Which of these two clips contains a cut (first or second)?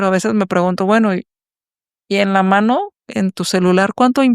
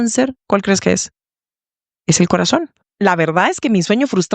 second